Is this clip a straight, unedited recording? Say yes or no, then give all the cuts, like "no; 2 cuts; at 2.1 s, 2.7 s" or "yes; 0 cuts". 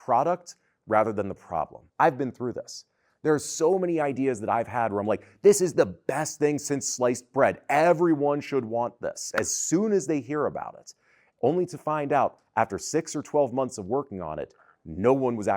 no; 2 cuts; at 1.8 s, 9.3 s